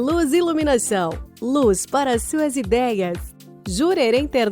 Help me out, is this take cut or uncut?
cut